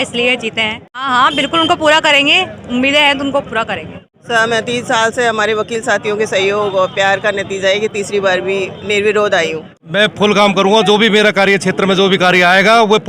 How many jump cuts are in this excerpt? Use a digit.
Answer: 3